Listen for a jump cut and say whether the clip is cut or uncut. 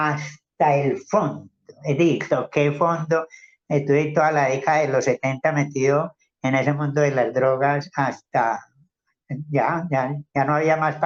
uncut